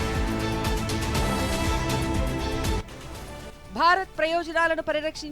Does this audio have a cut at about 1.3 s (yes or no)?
no